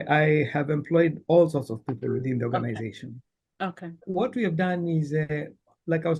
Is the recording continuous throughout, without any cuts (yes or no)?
no